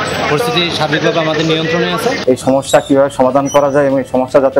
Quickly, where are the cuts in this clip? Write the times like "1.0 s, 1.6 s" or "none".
2.2 s